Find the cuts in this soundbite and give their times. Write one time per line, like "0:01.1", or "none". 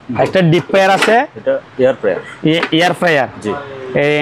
none